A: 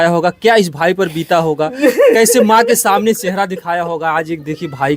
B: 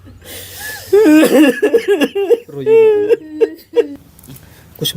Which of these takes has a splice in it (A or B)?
B